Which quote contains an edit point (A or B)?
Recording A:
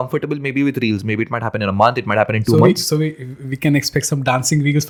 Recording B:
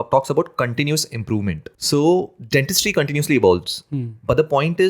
B